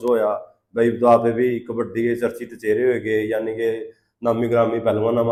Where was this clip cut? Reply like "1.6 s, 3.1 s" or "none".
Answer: none